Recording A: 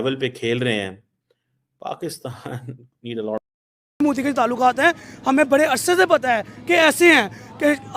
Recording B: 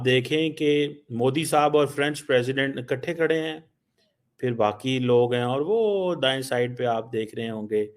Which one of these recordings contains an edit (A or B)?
A